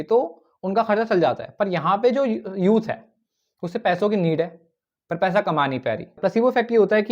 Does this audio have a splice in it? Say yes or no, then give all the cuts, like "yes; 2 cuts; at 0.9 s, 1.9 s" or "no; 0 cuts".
yes; 1 cut; at 6.1 s